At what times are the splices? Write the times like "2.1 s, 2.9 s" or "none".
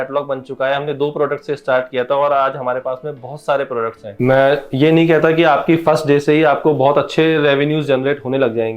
4.1 s